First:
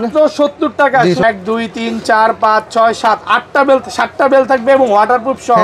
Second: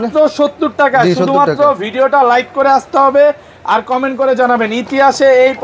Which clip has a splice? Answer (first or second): first